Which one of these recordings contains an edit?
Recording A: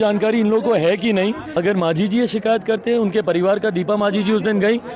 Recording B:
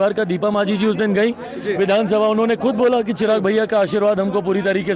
A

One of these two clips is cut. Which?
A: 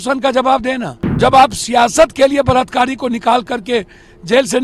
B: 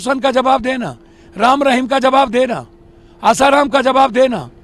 A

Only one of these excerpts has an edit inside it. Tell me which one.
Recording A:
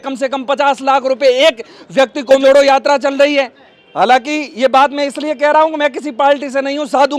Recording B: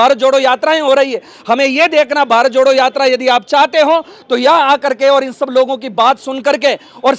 A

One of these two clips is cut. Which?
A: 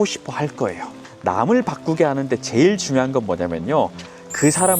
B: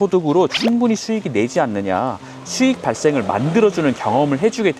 A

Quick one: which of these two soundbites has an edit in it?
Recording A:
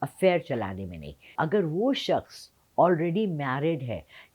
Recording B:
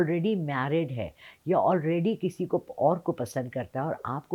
A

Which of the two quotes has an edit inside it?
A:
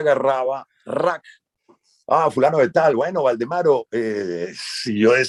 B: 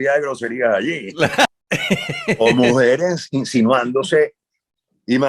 B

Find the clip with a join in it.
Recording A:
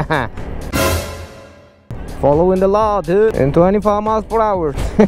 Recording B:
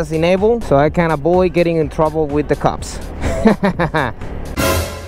A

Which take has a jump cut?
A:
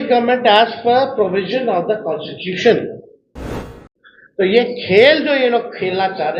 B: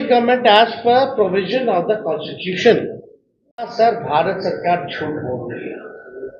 A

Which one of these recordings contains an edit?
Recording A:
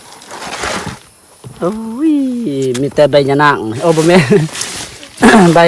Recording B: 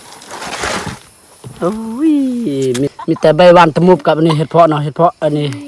B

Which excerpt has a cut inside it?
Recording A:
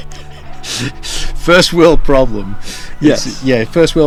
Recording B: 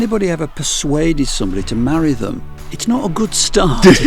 B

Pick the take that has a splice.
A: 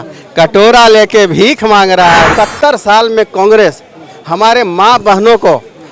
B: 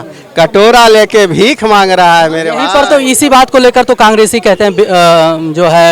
A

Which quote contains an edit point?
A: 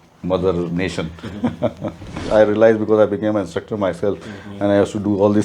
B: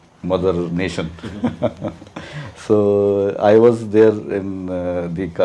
A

